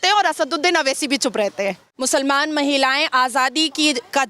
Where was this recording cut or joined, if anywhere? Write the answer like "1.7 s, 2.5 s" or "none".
1.9 s